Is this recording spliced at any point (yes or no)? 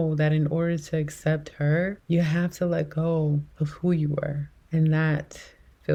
no